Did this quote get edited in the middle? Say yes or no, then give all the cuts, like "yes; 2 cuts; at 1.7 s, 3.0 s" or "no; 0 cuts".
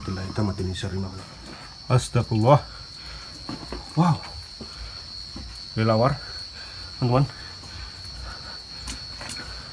yes; 1 cut; at 1.3 s